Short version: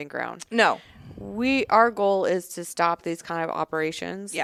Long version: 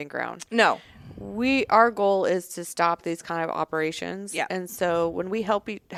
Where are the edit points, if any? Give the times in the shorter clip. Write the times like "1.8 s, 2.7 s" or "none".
none